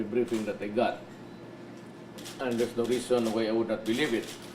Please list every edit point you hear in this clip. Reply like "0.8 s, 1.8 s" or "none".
3.2 s